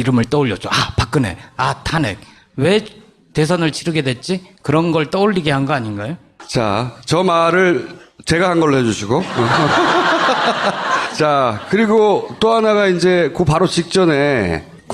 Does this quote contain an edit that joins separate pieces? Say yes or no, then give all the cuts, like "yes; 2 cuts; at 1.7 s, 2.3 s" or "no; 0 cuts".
yes; 1 cut; at 12.6 s